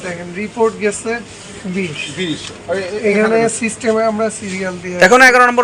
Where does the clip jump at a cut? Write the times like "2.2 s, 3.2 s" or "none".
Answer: none